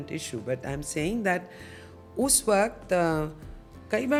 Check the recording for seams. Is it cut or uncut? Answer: uncut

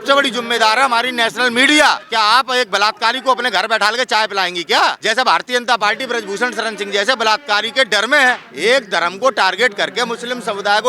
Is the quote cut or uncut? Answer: cut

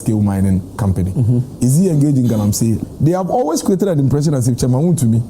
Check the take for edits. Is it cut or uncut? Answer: cut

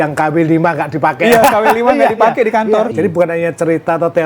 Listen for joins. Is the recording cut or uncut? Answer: cut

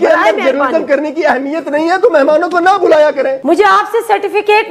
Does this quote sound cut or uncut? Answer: cut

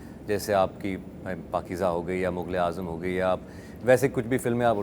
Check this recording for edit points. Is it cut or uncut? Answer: uncut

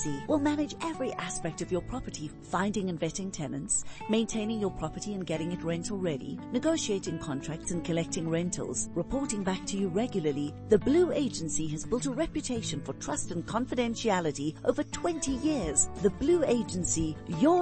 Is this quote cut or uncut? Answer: uncut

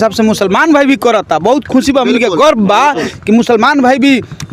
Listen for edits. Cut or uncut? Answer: uncut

